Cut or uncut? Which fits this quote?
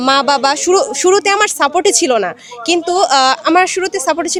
uncut